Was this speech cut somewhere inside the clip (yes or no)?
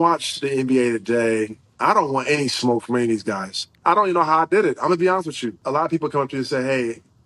yes